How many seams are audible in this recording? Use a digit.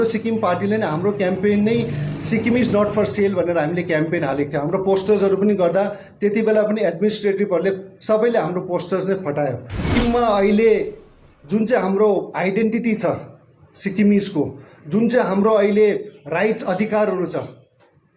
1